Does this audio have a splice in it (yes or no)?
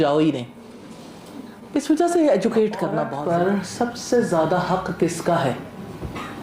yes